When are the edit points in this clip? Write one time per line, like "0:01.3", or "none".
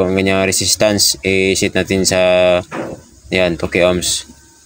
none